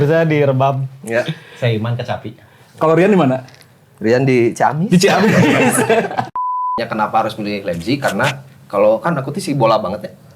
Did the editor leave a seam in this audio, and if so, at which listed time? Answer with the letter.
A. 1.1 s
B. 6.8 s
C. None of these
B